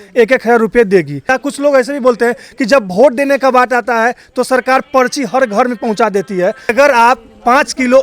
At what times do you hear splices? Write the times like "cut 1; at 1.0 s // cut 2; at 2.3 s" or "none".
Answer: cut 1; at 1.3 s // cut 2; at 6.7 s

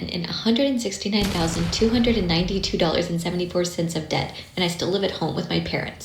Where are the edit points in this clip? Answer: none

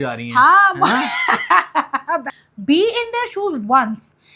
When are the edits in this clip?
cut 1; at 2.3 s

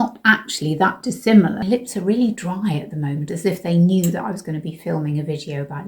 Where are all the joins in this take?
cut 1; at 1.6 s // cut 2; at 3.3 s

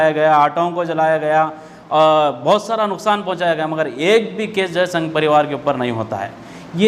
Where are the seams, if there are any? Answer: none

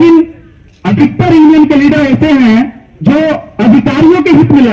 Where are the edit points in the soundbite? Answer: none

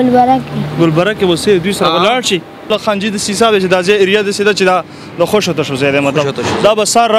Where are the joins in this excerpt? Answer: cut 1; at 2.7 s

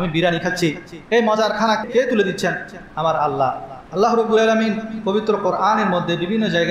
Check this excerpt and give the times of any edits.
cut 1; at 1.8 s // cut 2; at 3.7 s

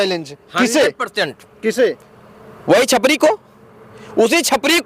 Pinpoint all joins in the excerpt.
none

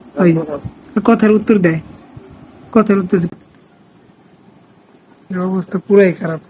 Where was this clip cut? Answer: cut 1; at 3.3 s

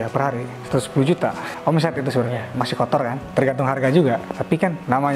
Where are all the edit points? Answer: cut 1; at 2.5 s

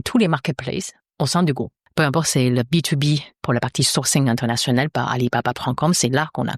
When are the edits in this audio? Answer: cut 1; at 1.0 s // cut 2; at 1.8 s // cut 3; at 3.3 s

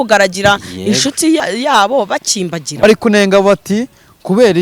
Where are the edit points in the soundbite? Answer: cut 1; at 1.4 s // cut 2; at 2.8 s

